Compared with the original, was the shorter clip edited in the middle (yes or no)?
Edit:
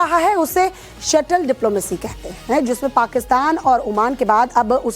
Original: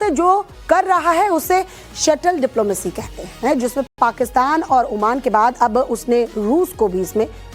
yes